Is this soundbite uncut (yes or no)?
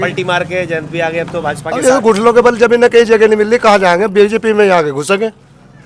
yes